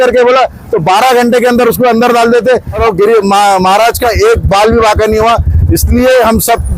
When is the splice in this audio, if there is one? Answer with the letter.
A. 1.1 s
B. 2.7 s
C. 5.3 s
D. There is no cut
B